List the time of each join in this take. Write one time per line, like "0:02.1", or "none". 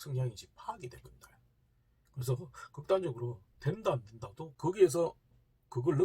0:04.5